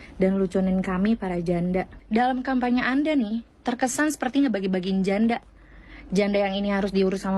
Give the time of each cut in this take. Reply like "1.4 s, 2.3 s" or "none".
2.0 s